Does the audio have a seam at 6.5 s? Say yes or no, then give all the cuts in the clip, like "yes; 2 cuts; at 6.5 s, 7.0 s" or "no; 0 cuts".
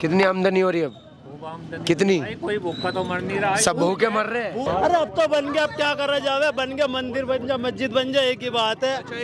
no; 1 cut; at 4.6 s